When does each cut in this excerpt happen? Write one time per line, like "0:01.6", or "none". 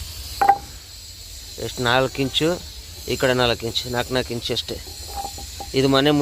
none